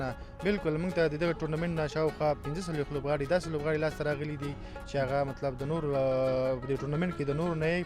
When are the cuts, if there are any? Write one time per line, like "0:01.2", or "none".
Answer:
none